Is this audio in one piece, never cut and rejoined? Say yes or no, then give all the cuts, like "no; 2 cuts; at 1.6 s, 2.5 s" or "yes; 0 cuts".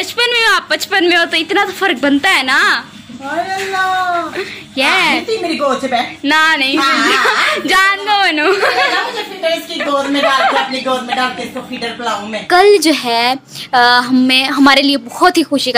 no; 1 cut; at 12.4 s